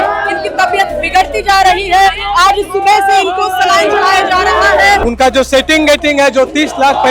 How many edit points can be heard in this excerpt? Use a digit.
1